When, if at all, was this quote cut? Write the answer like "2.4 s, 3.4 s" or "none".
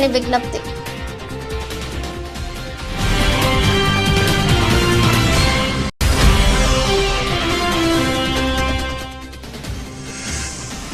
1.5 s, 6.0 s